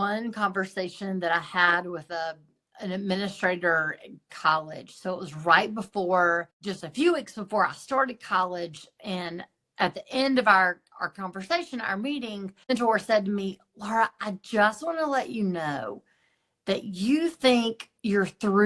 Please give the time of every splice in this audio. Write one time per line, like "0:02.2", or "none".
0:06.6
0:12.7